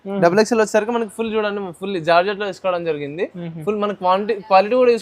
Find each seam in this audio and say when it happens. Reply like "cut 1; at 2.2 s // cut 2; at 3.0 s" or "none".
none

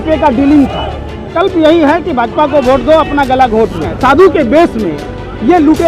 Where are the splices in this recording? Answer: cut 1; at 1.2 s // cut 2; at 3.9 s

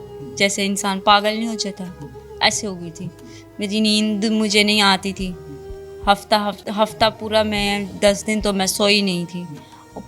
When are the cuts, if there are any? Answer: none

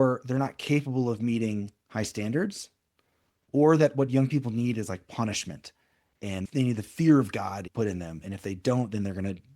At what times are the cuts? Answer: cut 1; at 6.4 s // cut 2; at 7.7 s

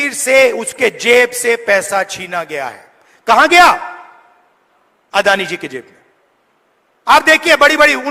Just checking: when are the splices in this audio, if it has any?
none

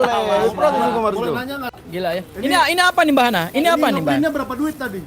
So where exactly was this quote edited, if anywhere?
cut 1; at 1.8 s

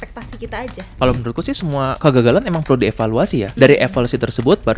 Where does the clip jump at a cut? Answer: cut 1; at 0.8 s // cut 2; at 1.9 s // cut 3; at 3.5 s

